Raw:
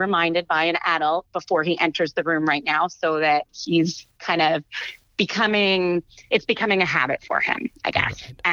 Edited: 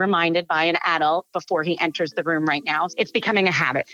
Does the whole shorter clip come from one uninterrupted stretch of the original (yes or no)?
no